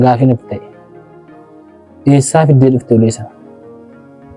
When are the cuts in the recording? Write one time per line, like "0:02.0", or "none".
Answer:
0:03.4